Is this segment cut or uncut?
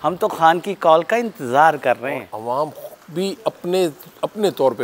cut